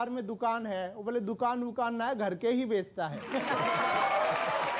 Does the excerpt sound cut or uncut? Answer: uncut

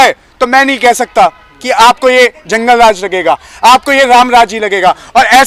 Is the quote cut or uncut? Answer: uncut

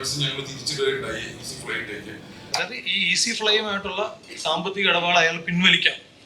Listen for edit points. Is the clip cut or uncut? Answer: cut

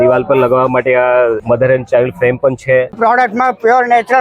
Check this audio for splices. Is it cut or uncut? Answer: cut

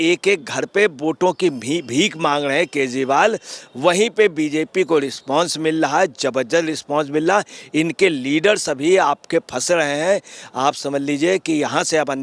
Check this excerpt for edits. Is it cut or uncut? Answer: uncut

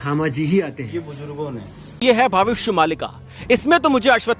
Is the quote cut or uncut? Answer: cut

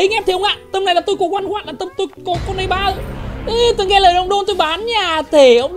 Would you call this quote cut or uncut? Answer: uncut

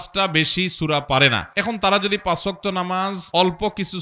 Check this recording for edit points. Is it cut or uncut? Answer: cut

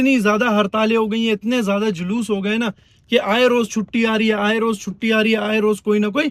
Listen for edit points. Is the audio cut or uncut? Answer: uncut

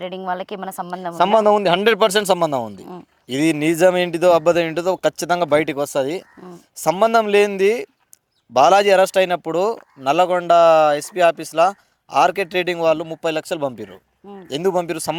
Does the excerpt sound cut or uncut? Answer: uncut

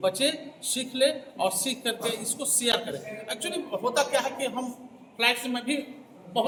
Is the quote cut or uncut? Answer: uncut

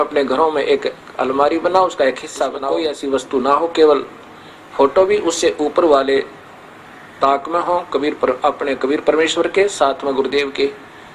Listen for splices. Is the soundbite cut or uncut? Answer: cut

